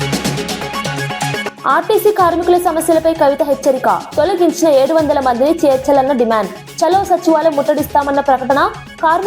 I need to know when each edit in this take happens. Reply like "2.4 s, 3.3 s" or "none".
1.6 s